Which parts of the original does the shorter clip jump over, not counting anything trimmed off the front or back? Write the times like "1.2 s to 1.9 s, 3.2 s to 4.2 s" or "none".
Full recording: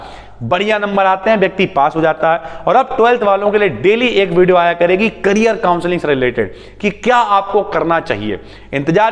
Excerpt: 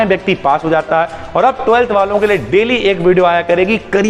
none